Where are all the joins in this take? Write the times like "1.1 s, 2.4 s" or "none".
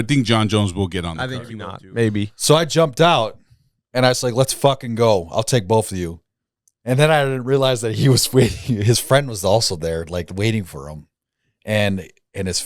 1.7 s